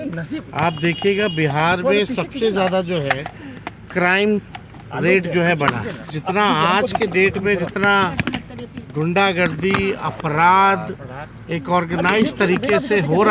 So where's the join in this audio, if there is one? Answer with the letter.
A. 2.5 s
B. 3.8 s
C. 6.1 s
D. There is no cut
C